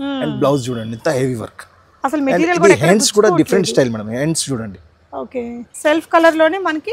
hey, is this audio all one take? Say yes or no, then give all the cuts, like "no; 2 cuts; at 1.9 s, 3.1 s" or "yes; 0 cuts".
no; 1 cut; at 5.7 s